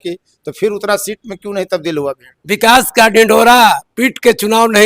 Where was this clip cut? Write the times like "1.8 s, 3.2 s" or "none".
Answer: 2.3 s